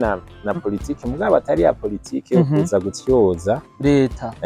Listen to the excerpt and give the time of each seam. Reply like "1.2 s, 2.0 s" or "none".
none